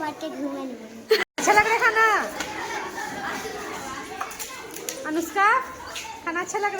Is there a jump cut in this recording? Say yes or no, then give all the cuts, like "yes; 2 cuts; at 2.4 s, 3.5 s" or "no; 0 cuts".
yes; 1 cut; at 1.3 s